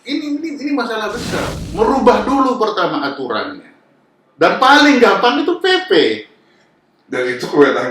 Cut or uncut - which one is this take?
cut